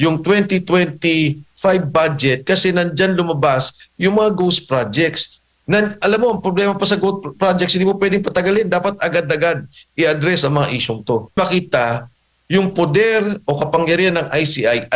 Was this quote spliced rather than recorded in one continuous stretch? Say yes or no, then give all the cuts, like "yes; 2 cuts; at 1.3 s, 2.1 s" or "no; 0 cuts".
yes; 1 cut; at 11.4 s